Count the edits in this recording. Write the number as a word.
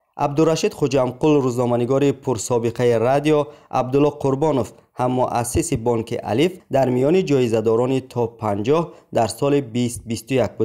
one